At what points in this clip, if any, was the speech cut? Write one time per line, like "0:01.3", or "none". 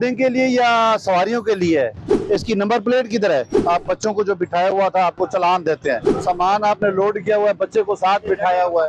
0:02.1
0:03.5
0:06.1